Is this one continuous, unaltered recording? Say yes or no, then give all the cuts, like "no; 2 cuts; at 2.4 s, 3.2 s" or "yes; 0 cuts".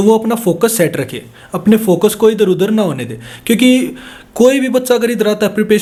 yes; 0 cuts